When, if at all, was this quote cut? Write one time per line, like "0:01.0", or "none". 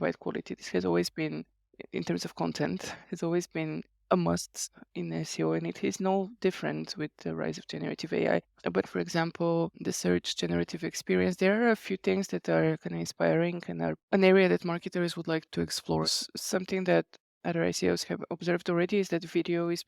0:07.2
0:08.8
0:09.8
0:14.0
0:15.8

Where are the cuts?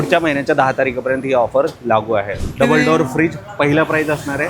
0:02.3

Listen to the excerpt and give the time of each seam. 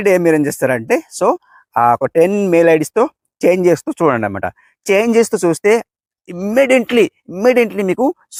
none

